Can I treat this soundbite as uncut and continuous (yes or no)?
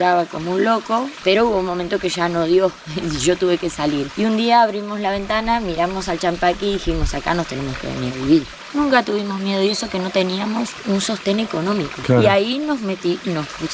no